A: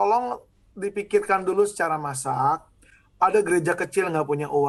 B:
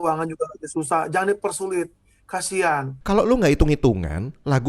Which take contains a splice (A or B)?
B